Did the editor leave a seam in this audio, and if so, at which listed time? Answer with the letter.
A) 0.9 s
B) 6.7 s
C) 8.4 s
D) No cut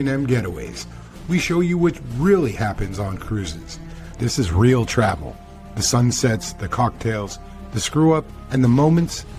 C